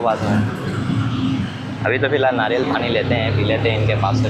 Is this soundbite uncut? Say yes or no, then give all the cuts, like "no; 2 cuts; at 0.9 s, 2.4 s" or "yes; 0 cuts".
yes; 0 cuts